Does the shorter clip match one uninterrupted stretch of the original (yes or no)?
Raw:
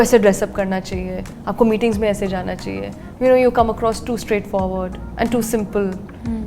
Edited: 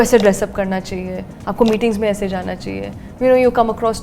yes